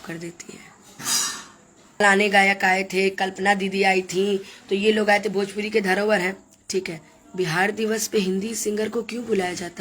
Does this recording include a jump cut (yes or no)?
yes